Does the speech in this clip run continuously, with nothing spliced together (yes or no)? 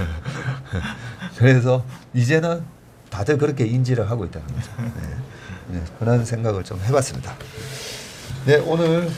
yes